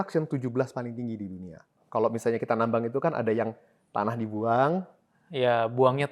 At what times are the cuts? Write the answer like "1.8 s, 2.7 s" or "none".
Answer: 1.8 s